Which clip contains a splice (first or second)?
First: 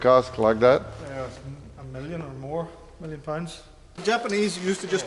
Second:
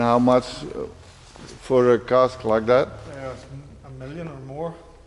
first